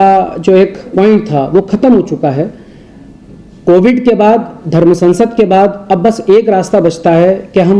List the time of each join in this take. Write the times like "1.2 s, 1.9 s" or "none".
none